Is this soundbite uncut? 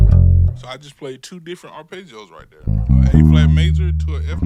yes; 0 cuts

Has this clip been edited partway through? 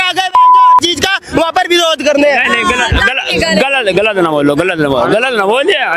no; 0 cuts

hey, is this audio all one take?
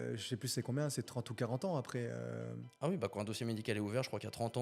yes; 0 cuts

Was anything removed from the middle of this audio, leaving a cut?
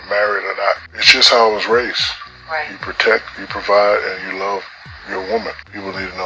yes; 1 cut; at 0.9 s

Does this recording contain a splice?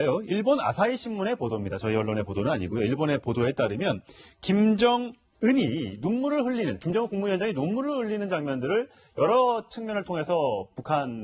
no; 0 cuts

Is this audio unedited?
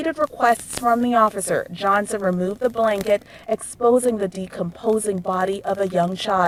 yes; 0 cuts

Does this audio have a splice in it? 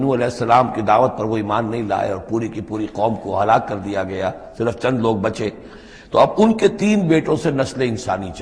no; 0 cuts

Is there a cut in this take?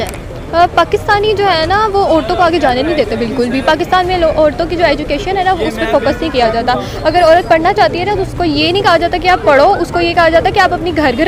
no; 0 cuts

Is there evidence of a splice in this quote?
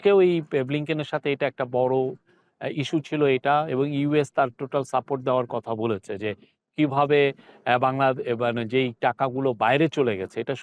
no; 0 cuts

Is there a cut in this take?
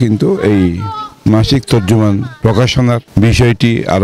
yes; 1 cut; at 3.1 s

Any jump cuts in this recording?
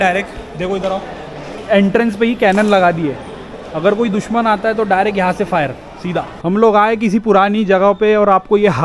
yes; 2 cuts; at 1.6 s, 6.3 s

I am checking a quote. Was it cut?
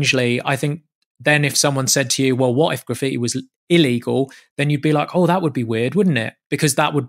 no; 0 cuts

